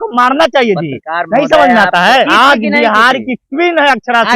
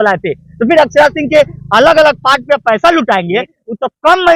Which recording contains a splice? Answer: first; 1 cut; at 2.0 s

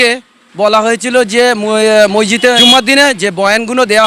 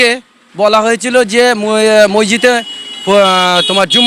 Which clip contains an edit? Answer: first; 1 cut; at 2.6 s

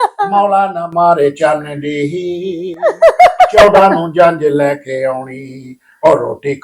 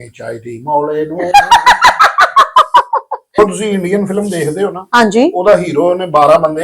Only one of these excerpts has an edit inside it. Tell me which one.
second; 1 cut; at 3.2 s

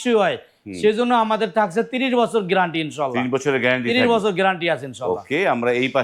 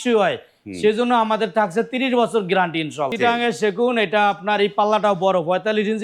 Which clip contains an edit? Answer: second; 1 cut; at 3.1 s

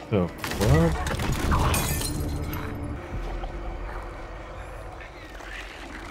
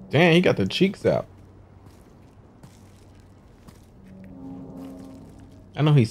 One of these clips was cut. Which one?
first; 1 cut; at 3.0 s

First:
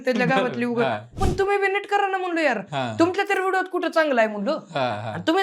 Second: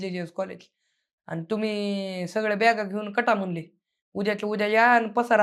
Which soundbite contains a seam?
first; 1 cut; at 1.1 s

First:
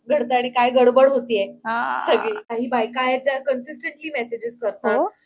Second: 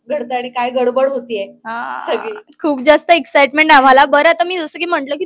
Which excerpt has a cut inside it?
first; 1 cut; at 2.4 s

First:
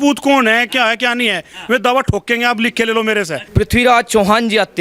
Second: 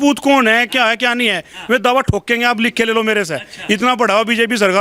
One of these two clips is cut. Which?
first; 1 cut; at 3.4 s

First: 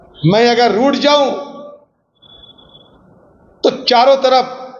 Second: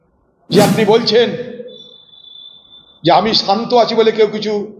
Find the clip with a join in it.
first; 1 cut; at 2.2 s

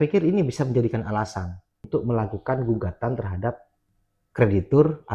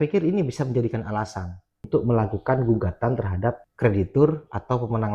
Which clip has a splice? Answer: second; 1 cut; at 3.7 s

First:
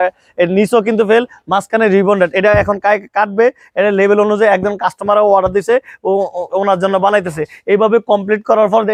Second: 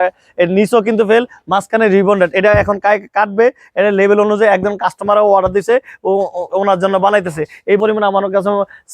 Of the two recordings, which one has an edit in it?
second; 1 cut; at 7.8 s

